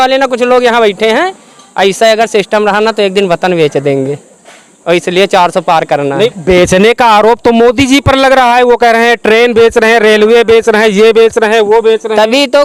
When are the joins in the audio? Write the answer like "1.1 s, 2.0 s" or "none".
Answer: none